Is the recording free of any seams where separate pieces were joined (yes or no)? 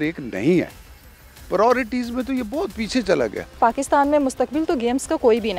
no